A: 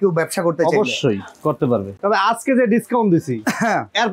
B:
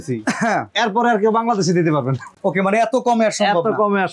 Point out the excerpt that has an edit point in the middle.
A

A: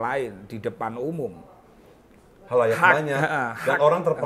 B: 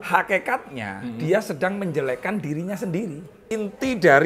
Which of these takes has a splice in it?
B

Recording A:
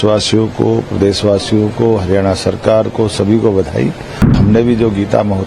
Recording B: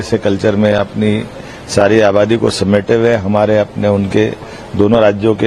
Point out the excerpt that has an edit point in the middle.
A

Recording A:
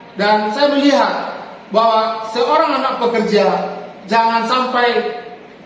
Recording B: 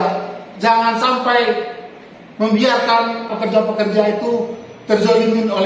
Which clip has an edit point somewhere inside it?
B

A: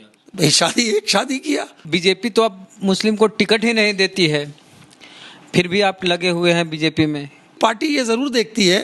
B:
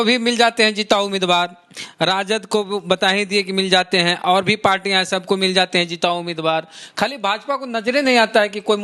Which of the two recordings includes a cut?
A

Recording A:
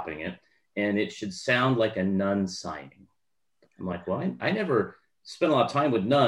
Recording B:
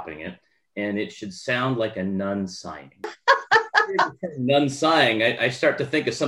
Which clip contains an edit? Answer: B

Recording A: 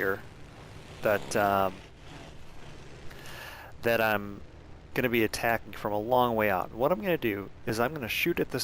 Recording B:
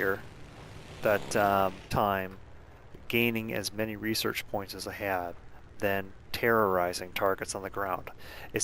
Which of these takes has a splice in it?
A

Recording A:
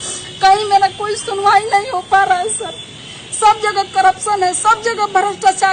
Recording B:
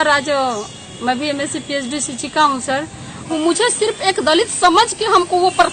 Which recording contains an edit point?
B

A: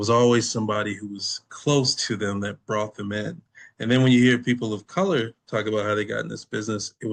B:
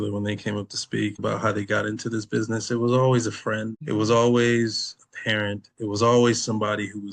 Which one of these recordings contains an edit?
B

